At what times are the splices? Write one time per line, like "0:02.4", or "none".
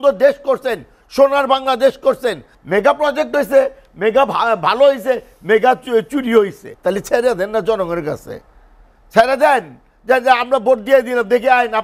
0:02.5
0:06.7